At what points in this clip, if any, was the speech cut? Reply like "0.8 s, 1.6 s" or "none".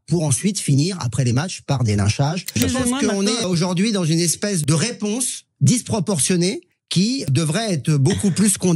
2.5 s, 3.4 s, 4.6 s, 7.2 s